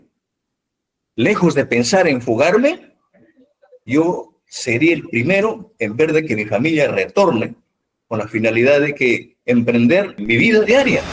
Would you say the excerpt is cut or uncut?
cut